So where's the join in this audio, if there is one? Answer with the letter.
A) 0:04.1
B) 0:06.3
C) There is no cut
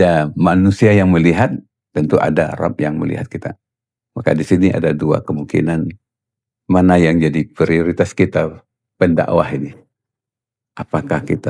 C